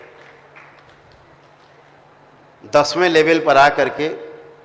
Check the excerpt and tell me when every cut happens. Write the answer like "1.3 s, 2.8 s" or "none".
2.0 s